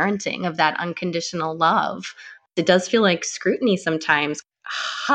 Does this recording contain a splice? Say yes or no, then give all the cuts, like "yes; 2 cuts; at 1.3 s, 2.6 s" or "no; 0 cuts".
yes; 2 cuts; at 2.5 s, 4.4 s